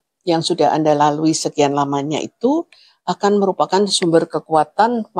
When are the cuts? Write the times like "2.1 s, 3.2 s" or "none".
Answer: none